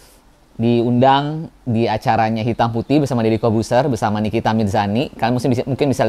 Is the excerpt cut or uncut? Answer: uncut